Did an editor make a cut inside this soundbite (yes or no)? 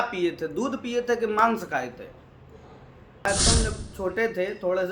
yes